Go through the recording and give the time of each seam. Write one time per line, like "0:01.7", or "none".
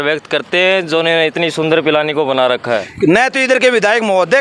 0:02.9